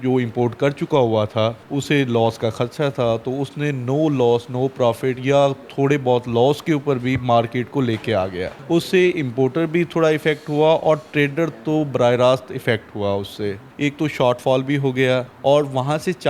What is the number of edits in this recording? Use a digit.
4